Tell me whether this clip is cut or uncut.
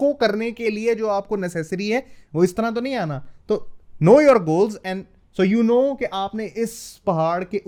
uncut